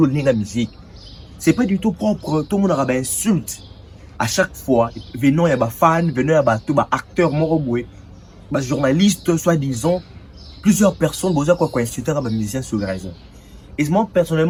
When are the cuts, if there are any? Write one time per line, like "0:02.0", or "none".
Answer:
none